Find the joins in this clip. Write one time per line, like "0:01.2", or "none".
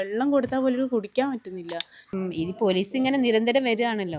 0:02.0